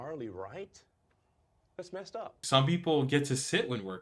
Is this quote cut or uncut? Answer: cut